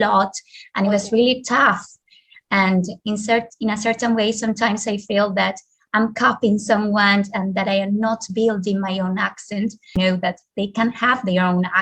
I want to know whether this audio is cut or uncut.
cut